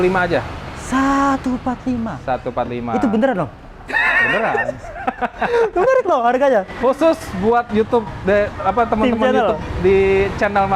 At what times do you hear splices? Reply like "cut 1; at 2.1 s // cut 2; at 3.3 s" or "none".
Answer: none